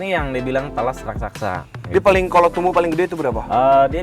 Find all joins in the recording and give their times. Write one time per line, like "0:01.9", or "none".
0:01.7